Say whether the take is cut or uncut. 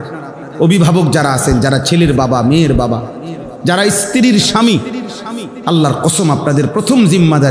uncut